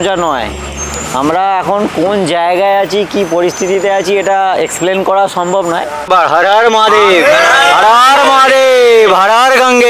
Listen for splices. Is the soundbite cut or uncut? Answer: cut